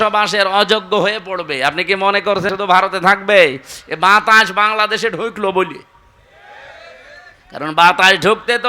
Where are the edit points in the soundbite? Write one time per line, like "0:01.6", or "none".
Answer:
0:02.5